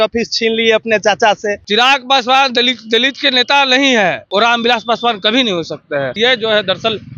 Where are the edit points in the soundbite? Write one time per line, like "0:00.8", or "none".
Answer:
0:01.6
0:04.2
0:06.2